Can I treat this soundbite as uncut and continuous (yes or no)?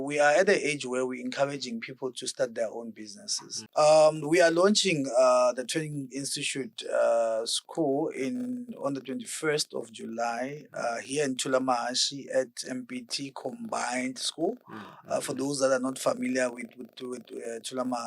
no